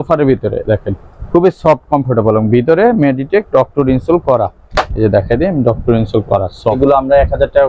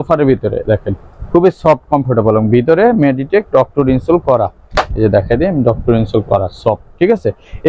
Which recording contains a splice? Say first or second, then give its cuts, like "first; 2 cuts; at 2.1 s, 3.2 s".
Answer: first; 1 cut; at 6.8 s